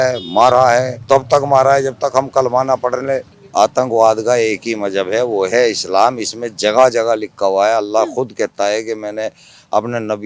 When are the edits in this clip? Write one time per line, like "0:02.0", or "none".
0:00.9
0:03.3